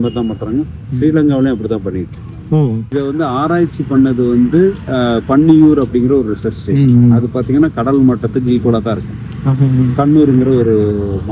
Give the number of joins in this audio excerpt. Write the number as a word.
one